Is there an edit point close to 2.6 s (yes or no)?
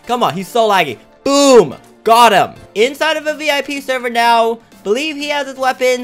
yes